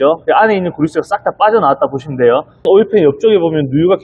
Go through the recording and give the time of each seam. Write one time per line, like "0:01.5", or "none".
0:02.7